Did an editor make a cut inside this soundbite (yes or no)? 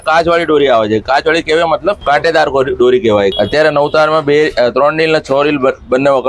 yes